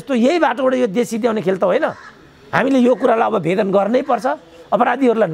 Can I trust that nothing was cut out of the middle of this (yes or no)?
yes